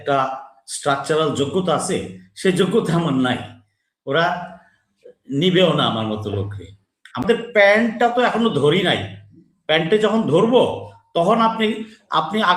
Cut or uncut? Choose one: cut